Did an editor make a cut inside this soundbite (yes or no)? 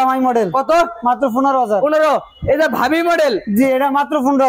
no